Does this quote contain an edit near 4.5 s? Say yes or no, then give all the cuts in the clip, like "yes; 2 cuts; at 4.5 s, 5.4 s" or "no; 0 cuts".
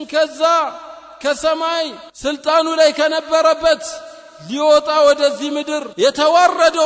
no; 2 cuts; at 2.0 s, 5.8 s